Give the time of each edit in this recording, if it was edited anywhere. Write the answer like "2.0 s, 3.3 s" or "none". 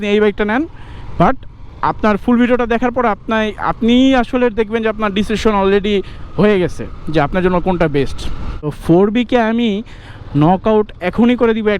8.8 s